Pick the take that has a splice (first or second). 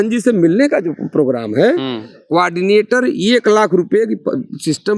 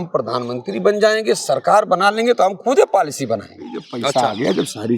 second